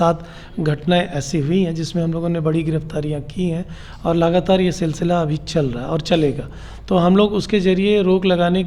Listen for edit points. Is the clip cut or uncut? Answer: uncut